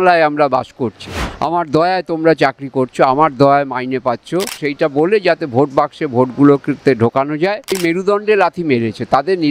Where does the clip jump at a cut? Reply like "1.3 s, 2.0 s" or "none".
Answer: 1.3 s, 4.6 s, 7.8 s